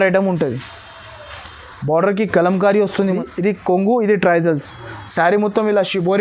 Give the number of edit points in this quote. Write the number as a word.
one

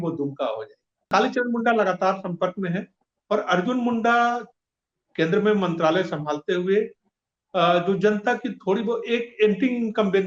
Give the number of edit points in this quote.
one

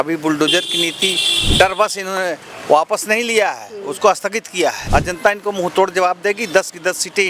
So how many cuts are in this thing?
one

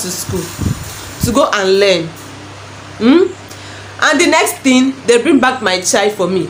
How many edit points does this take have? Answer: zero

